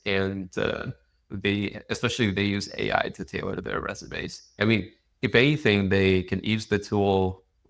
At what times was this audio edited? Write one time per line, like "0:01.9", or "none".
0:04.5